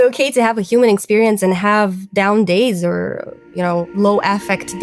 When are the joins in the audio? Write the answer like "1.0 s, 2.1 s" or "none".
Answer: 3.9 s